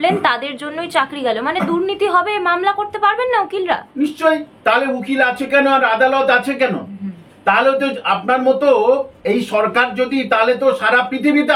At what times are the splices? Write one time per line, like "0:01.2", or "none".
none